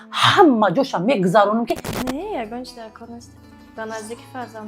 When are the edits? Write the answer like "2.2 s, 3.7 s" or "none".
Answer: 1.9 s